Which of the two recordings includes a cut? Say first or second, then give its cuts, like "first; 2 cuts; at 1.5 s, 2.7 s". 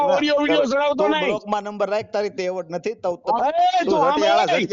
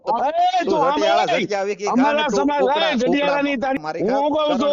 second; 1 cut; at 3.8 s